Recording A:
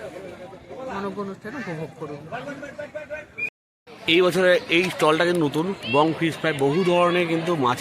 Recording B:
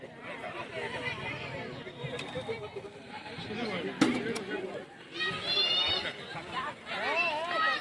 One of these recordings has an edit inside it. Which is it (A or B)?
A